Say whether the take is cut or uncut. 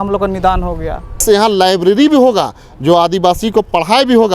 cut